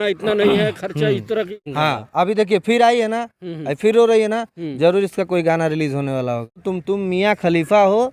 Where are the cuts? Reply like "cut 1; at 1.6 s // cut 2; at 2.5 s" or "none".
cut 1; at 1.7 s // cut 2; at 6.6 s